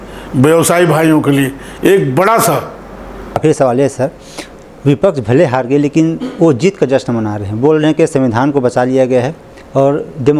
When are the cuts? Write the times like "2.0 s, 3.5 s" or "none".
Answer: 3.3 s